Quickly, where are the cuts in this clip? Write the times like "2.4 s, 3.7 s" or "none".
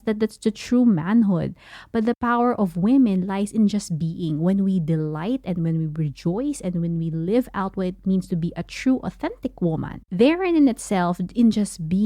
10.0 s